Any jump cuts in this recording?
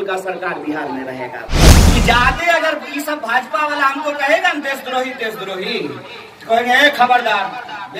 yes; 1 cut; at 1.7 s

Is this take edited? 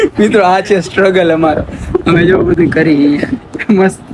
no; 0 cuts

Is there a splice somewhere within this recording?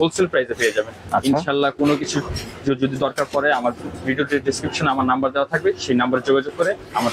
no; 0 cuts

